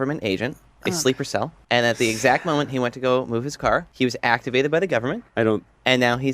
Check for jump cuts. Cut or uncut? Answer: cut